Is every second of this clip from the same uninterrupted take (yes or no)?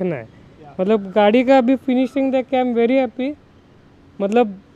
yes